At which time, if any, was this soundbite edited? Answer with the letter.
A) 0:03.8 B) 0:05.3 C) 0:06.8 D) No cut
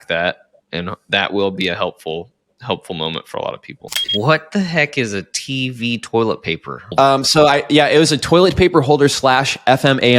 A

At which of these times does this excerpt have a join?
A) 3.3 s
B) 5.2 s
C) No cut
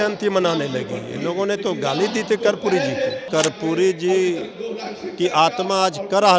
A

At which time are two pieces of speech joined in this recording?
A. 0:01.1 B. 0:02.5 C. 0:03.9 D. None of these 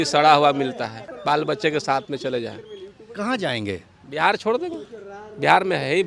A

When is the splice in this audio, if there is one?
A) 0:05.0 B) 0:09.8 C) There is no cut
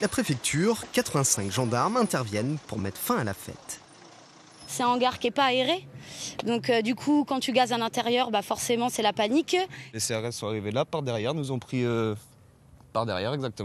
A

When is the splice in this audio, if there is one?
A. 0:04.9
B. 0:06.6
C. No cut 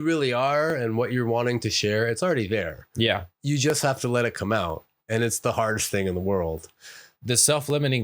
C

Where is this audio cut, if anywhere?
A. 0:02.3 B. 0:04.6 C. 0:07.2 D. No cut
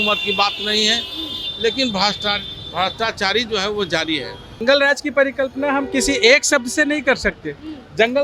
B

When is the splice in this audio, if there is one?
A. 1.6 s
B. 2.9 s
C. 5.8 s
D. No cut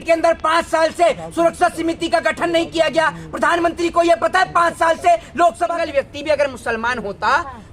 C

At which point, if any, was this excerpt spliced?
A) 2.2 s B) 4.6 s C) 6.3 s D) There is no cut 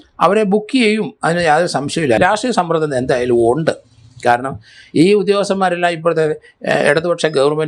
A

